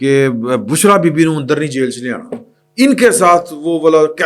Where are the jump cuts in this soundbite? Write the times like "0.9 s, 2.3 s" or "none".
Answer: none